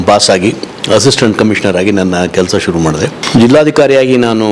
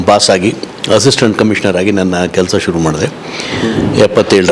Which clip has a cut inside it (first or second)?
first